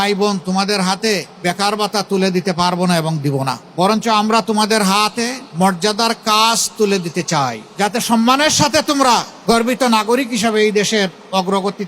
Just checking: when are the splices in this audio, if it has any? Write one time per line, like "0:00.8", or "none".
0:01.3
0:03.6
0:05.4
0:07.6
0:09.3